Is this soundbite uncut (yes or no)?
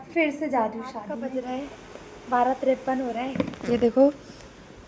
no